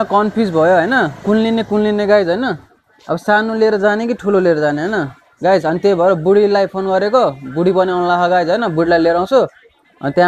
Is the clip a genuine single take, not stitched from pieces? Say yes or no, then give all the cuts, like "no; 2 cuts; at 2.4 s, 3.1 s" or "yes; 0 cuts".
yes; 0 cuts